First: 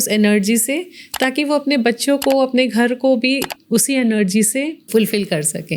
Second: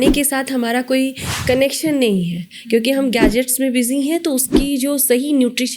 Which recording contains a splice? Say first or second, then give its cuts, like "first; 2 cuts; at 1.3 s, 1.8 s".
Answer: first; 1 cut; at 4.8 s